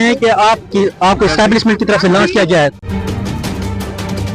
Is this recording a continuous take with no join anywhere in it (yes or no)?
no